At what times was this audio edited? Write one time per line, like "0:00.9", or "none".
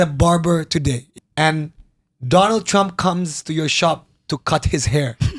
0:01.1

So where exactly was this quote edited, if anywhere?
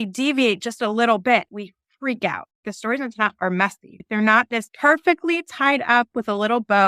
0:02.6

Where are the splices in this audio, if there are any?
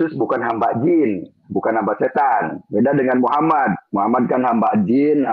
none

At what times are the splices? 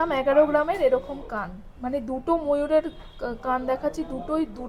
none

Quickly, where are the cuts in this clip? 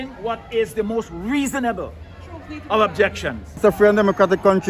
0:03.6

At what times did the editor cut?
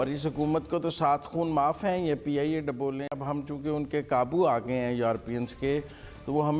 0:03.2

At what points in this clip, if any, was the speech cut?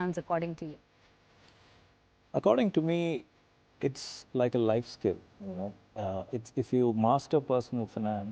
none

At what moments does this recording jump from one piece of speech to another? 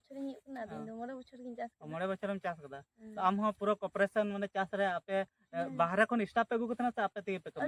none

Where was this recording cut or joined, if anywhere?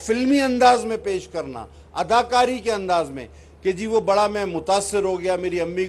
none

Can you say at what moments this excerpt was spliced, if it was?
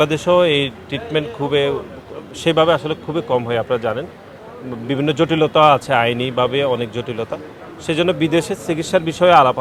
none

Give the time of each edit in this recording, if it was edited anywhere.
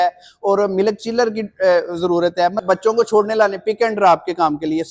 0:02.6

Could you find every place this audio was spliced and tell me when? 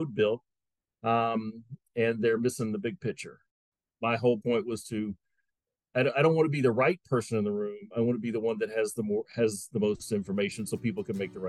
0:03.4

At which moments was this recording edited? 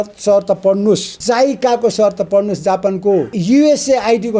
0:01.1
0:03.3

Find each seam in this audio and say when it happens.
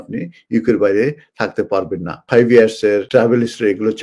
0:02.2
0:03.1

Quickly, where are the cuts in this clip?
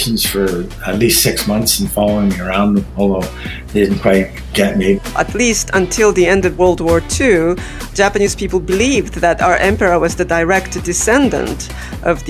0:05.1

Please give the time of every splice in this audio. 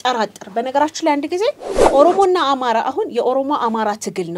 0:01.7

